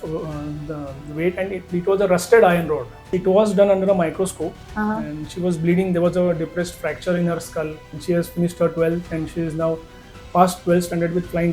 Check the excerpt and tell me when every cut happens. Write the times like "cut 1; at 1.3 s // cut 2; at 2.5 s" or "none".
cut 1; at 3.1 s // cut 2; at 7.9 s